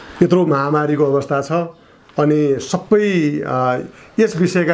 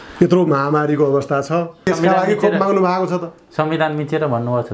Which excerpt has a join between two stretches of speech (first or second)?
second